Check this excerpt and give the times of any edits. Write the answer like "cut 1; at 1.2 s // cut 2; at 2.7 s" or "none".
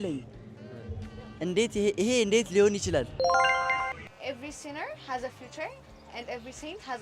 cut 1; at 4.0 s